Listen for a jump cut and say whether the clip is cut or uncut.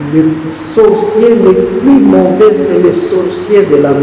uncut